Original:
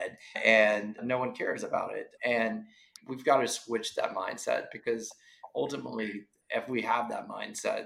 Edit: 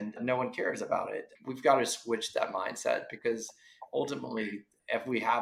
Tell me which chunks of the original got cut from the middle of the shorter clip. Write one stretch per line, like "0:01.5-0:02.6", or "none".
0:02.1-0:02.9